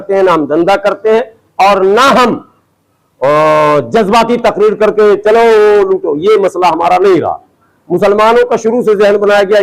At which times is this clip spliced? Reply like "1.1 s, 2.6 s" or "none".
none

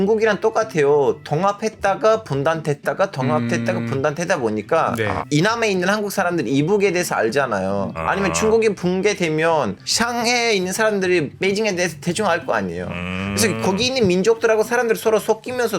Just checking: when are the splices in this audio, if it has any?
5.2 s, 7.9 s

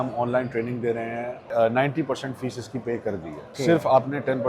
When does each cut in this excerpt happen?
1.4 s, 3.5 s

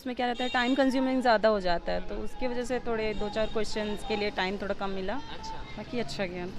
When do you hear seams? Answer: none

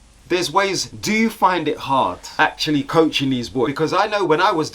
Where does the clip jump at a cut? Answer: 0.8 s, 2.2 s, 3.7 s

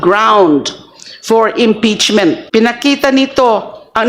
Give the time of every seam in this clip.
2.4 s

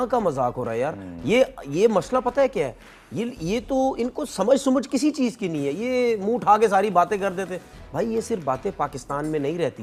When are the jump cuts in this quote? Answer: none

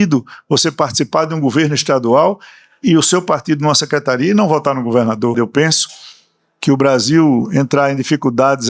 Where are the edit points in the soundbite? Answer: 5.3 s

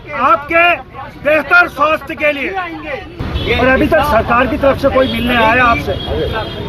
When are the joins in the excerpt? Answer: 3.3 s

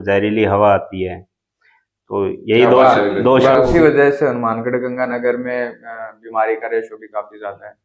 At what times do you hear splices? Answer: 3.6 s

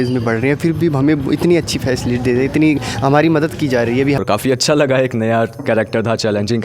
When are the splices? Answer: 4.2 s

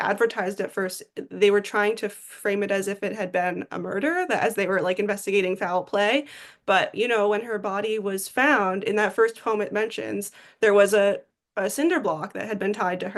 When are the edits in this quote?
none

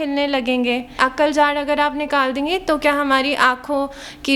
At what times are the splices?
1.0 s

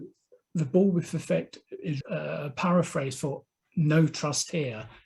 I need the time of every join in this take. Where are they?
2.0 s

